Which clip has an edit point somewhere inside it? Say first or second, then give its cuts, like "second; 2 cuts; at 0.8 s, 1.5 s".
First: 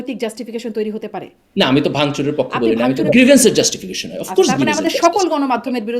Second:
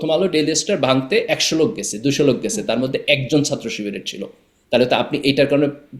first; 2 cuts; at 1.4 s, 3.1 s